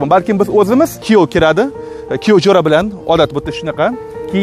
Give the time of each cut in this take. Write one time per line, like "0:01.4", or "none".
0:01.0

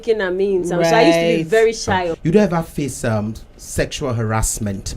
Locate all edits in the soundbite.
0:02.1

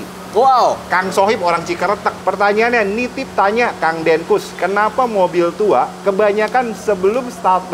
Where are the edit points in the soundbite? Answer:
0:02.1

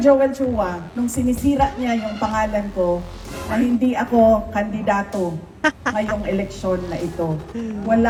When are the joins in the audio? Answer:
none

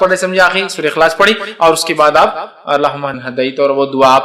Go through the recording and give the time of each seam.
0:03.2

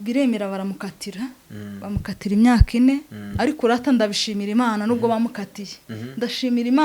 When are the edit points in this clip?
none

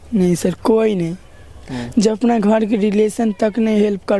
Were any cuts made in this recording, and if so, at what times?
none

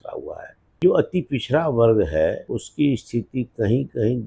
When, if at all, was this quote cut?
0:00.8
0:02.4

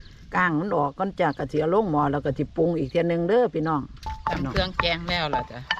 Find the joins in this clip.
0:04.1

